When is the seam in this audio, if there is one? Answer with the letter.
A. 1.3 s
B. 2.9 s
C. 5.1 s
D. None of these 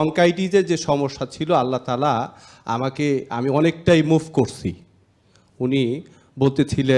D